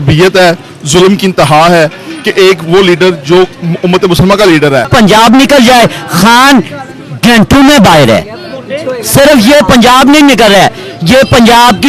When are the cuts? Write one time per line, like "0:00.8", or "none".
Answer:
0:04.9